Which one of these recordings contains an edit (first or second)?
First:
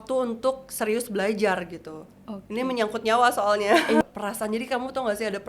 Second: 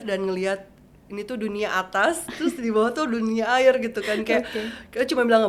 first